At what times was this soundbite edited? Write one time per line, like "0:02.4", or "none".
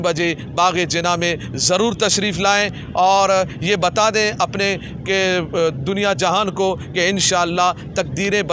none